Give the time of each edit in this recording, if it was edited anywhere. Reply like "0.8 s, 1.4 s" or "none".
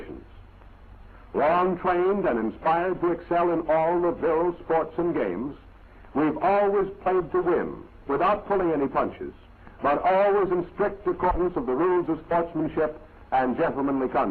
10.8 s